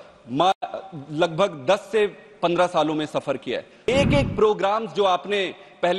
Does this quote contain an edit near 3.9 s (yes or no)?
yes